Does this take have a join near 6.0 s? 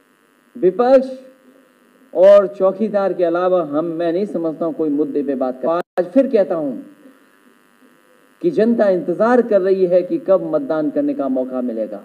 yes; 1 cut; at 6.0 s

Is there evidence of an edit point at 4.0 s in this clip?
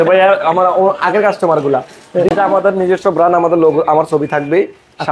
no; 1 cut; at 2.3 s

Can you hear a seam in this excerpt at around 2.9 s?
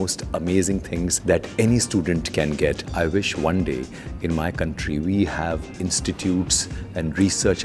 yes; 2 cuts; at 1.2 s, 2.9 s

